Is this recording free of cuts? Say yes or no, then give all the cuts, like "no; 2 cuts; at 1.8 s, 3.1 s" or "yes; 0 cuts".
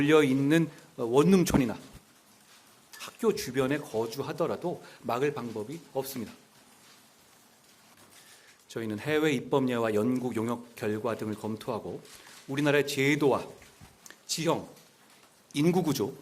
no; 1 cut; at 8.0 s